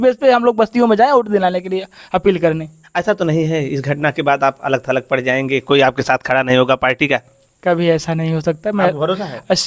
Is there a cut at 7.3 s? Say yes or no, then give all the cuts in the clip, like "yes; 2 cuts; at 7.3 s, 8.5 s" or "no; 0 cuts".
no; 1 cut; at 2.8 s